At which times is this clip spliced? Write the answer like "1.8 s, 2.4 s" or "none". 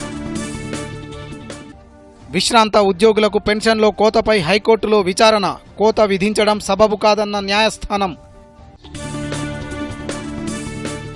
none